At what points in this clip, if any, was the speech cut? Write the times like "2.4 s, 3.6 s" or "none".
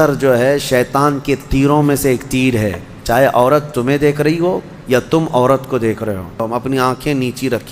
6.4 s